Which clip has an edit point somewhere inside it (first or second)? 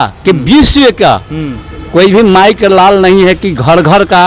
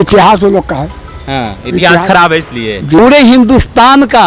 second